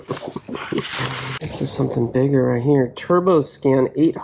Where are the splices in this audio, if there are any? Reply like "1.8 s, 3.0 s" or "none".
1.3 s